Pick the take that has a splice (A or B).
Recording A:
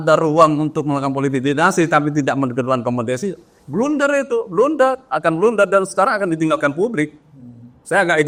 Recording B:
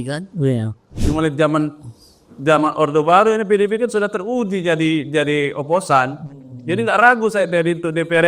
B